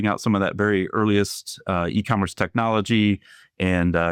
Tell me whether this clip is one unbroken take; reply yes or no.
yes